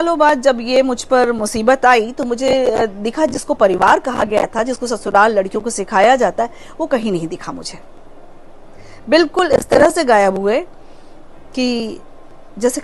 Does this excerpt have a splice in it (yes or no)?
no